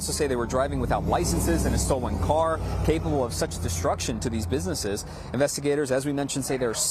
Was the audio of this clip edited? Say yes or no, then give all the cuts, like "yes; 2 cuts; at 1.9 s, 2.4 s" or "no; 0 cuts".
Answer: yes; 1 cut; at 4.7 s